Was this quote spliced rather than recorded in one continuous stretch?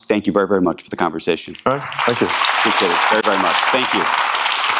no; 0 cuts

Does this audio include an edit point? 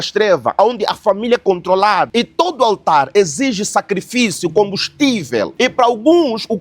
yes; 2 cuts; at 2.1 s, 5.5 s

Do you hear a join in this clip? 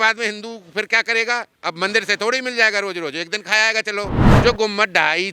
yes; 1 cut; at 4.3 s

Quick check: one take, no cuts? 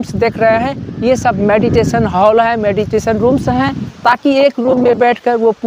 yes; 0 cuts

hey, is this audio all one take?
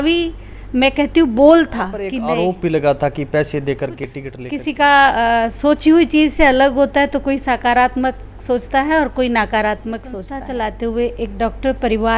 no; 3 cuts; at 2.0 s, 4.0 s, 10.3 s

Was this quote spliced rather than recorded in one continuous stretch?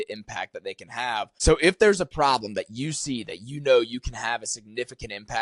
yes; 1 cut; at 1.3 s

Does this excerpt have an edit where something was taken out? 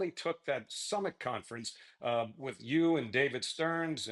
no; 0 cuts

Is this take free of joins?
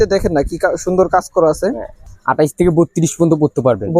no; 1 cut; at 2.2 s

